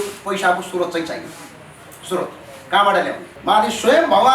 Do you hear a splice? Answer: yes; 1 cut; at 3.3 s

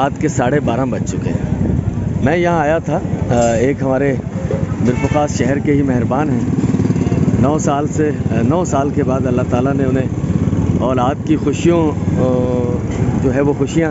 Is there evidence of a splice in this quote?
no; 0 cuts

